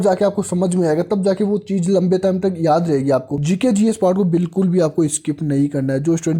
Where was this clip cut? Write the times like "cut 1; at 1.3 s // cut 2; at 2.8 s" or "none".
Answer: cut 1; at 3.3 s